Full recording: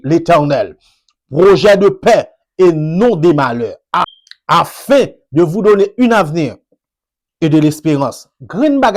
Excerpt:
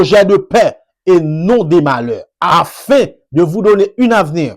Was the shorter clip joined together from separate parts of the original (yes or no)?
yes